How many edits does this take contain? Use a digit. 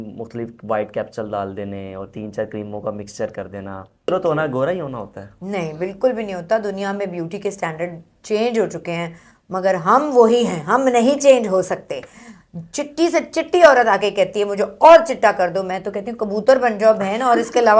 1